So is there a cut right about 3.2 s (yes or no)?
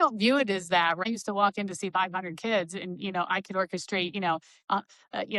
no